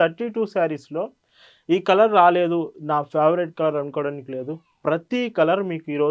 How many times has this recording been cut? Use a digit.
0